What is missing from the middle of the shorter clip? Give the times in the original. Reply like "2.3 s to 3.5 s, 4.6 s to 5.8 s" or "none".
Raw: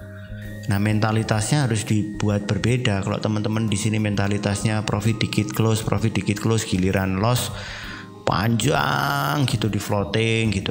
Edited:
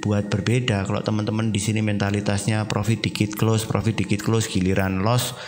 none